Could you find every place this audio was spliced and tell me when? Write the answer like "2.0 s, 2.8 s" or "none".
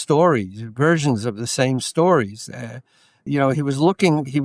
3.2 s